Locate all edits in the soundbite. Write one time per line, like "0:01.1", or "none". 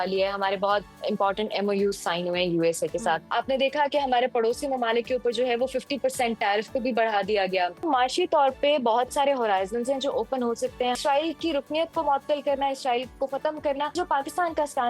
0:03.2
0:07.9
0:11.0
0:13.9